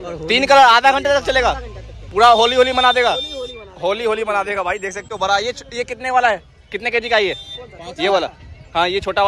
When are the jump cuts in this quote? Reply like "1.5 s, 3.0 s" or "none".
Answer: none